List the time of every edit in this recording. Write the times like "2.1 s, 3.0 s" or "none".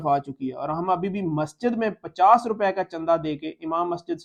none